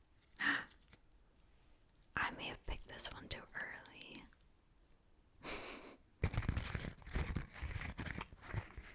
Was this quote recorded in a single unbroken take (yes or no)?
no